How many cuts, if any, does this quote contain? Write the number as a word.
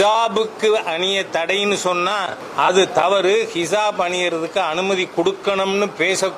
one